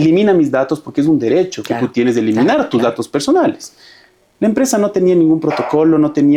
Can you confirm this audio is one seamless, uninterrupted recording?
yes; 0 cuts

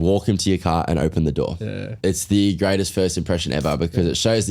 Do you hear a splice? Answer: yes; 1 cut; at 1.8 s

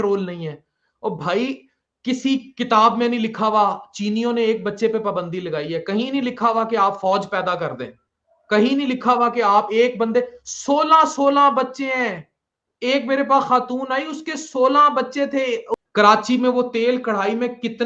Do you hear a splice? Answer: yes; 1 cut; at 15.8 s

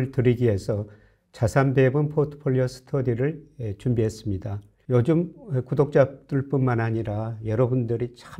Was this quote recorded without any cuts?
yes; 0 cuts

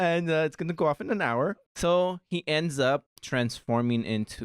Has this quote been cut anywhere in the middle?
yes; 2 cuts; at 1.7 s, 3.2 s

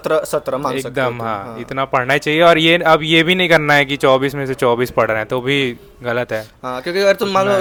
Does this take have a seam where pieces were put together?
no; 0 cuts

